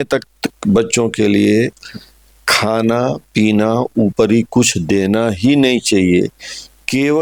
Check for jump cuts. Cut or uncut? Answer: uncut